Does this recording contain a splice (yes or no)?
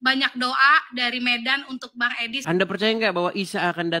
yes